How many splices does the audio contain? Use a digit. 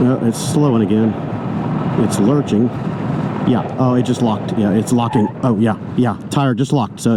0